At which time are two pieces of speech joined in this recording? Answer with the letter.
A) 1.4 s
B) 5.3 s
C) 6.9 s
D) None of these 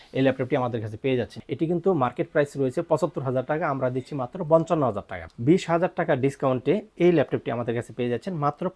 A